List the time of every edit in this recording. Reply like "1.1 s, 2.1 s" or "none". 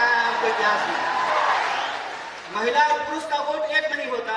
1.3 s